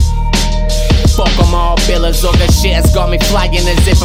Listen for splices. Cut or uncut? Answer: uncut